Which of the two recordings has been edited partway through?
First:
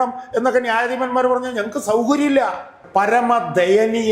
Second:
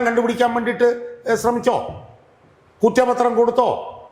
first; 1 cut; at 2.8 s

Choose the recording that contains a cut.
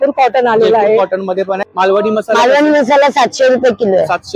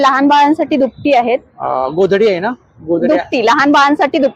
first; 1 cut; at 1.8 s

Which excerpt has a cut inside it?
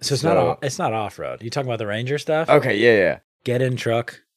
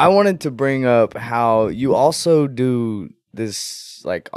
first; 1 cut; at 3.3 s

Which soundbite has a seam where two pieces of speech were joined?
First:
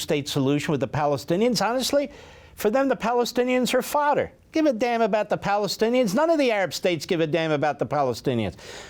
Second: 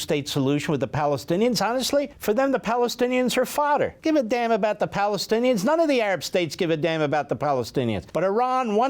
second; 3 cuts; at 2.1 s, 4.0 s, 8.0 s

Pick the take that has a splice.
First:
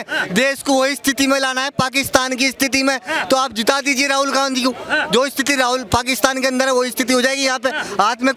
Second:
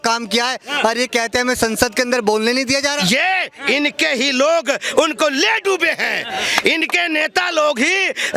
second; 1 cut; at 3.3 s

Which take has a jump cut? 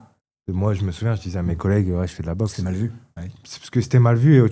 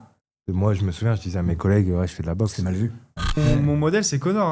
second; 1 cut; at 3.4 s

